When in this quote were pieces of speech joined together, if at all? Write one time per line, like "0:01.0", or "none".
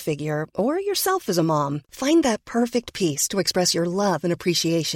none